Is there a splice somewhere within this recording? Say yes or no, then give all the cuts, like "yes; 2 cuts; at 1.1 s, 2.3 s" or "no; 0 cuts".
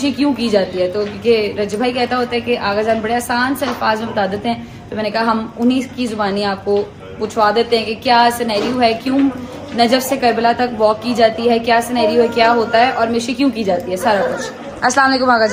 no; 0 cuts